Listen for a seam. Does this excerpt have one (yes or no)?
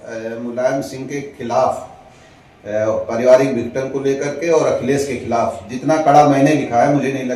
no